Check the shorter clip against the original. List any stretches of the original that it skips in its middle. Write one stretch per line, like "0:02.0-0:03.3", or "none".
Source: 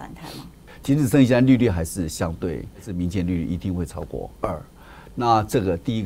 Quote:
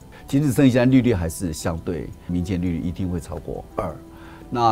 0:02.7-0:02.8

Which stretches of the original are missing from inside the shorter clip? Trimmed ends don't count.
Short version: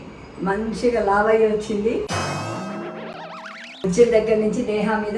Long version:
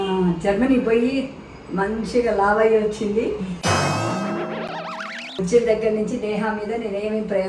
0:03.4-0:03.6

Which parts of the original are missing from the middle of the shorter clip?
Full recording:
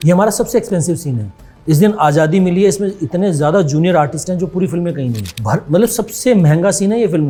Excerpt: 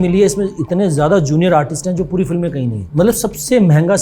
0:05.3-0:05.6

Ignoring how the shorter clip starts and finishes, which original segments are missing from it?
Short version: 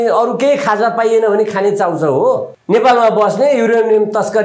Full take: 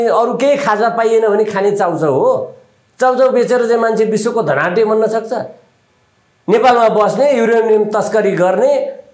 0:02.5-0:06.3

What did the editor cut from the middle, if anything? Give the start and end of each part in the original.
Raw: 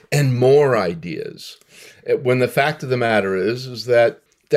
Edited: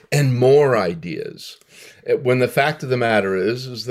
none

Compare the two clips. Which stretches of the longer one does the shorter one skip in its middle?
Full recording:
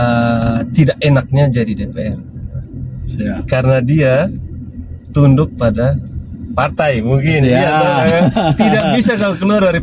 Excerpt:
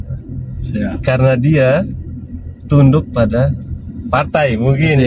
none

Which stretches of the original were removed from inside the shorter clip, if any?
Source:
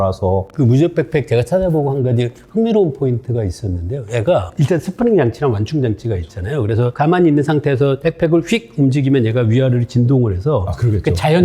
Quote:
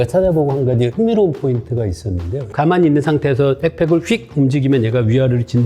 0:02.3-0:02.5
0:04.1-0:06.9

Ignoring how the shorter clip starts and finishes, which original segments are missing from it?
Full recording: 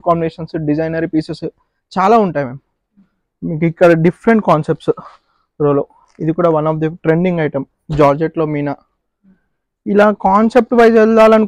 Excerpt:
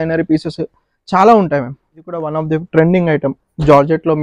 0:03.1-0:06.6

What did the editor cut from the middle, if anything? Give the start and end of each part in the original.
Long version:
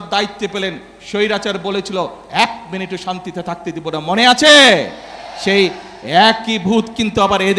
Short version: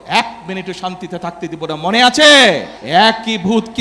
0:05.0-0:05.9

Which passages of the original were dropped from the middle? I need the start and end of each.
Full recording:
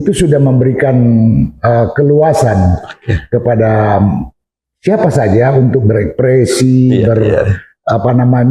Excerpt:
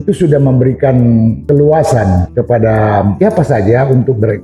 0:01.4-0:01.9
0:02.8-0:03.2
0:04.1-0:04.8

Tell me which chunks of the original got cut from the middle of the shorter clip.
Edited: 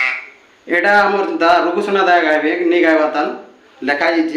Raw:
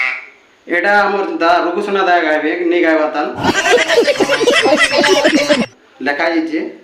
0:03.4-0:05.6

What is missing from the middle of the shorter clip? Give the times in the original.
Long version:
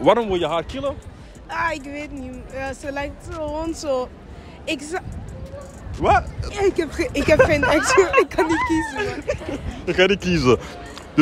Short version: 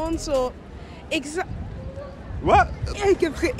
none

